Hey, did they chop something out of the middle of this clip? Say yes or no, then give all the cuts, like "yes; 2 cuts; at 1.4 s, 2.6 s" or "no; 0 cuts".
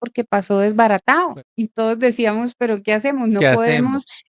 yes; 1 cut; at 1.4 s